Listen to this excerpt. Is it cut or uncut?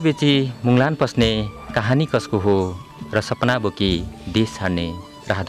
uncut